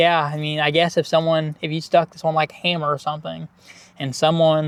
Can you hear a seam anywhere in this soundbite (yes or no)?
no